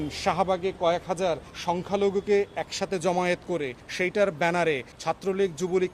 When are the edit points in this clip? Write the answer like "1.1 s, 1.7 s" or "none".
1.5 s, 3.8 s, 4.9 s